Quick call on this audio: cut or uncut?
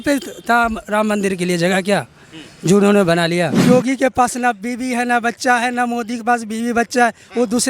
cut